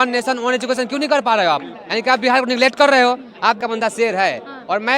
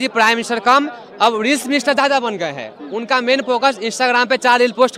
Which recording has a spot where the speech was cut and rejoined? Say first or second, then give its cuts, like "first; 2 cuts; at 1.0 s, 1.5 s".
first; 1 cut; at 3.6 s